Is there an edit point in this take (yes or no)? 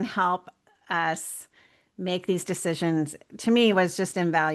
no